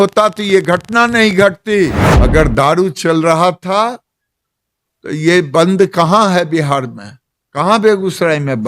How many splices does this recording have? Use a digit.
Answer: 1